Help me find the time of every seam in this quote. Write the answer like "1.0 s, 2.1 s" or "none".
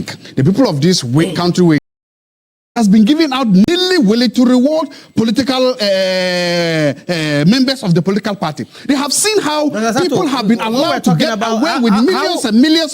2.4 s